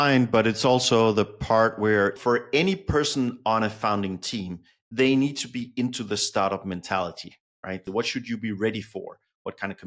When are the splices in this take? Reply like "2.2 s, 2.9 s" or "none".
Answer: 2.1 s, 7.8 s